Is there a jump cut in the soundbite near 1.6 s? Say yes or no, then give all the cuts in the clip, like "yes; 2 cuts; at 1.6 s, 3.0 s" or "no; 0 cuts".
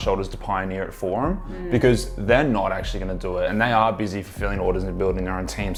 no; 0 cuts